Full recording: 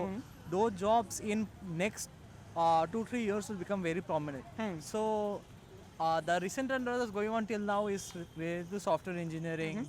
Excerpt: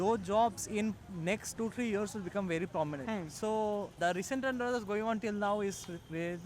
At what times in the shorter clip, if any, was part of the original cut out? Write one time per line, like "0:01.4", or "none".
0:01.6
0:03.0
0:04.0